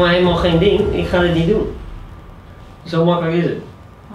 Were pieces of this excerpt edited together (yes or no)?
no